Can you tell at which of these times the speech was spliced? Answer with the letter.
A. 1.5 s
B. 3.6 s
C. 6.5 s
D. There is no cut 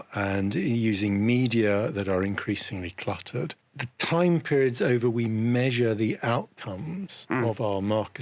B